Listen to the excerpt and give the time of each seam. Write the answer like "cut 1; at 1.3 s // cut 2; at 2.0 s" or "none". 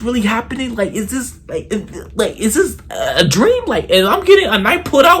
cut 1; at 1.6 s